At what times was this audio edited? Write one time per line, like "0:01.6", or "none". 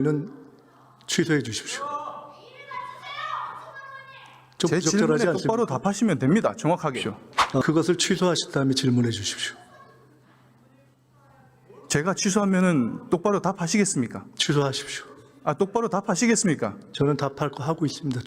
0:07.6